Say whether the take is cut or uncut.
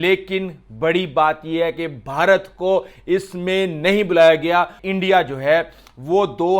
cut